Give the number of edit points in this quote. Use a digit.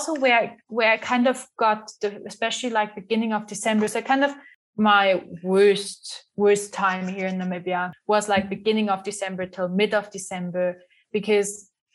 1